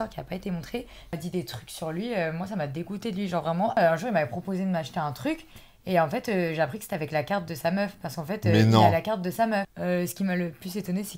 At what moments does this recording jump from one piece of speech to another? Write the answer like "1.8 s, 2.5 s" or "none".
1.1 s, 3.8 s, 9.7 s